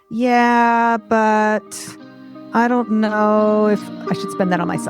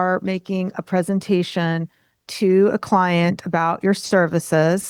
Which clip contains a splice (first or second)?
first